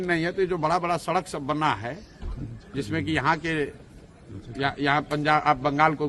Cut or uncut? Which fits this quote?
uncut